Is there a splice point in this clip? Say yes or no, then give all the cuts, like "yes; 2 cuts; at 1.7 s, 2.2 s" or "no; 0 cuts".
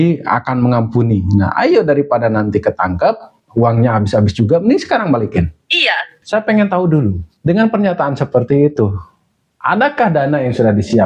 yes; 1 cut; at 6.1 s